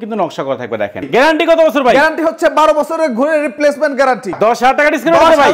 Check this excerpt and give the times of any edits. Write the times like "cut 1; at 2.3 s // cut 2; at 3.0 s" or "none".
cut 1; at 1.1 s // cut 2; at 4.3 s